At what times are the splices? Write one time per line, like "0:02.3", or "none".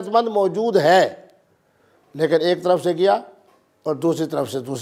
none